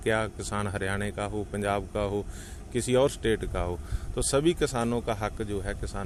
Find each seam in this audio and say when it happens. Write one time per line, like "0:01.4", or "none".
none